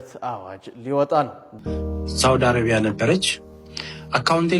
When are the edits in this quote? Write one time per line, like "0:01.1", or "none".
0:01.5